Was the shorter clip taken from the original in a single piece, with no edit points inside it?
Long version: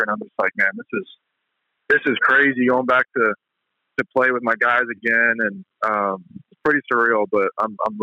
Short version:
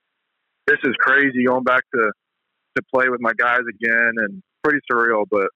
no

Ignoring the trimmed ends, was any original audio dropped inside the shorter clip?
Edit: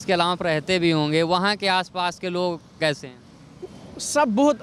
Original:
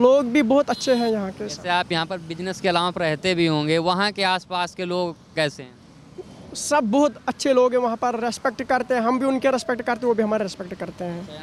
no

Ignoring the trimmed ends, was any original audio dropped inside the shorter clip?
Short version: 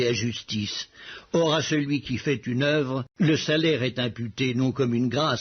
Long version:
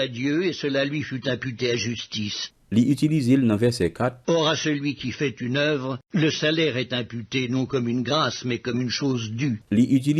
yes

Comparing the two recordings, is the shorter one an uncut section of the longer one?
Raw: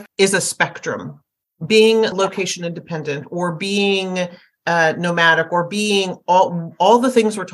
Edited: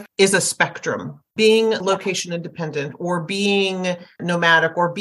no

